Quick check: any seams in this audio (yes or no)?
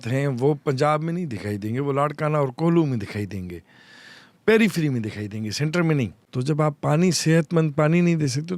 yes